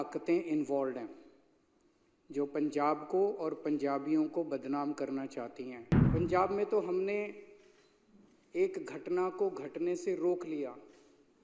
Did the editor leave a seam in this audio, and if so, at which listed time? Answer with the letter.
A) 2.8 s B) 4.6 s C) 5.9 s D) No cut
C